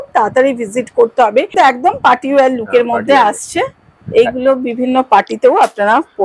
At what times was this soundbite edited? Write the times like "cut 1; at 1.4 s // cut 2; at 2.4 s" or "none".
cut 1; at 1.5 s